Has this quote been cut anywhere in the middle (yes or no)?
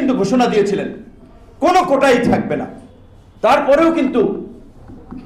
no